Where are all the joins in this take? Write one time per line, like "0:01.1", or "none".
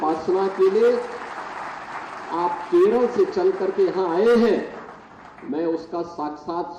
none

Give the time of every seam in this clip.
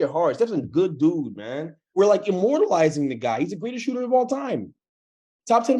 0:02.0

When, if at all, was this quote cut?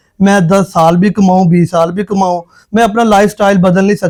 none

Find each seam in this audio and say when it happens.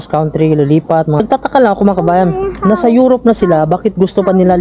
0:01.2

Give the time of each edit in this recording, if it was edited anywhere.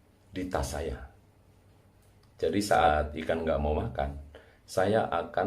0:02.9

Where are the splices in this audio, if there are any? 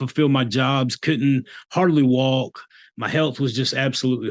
none

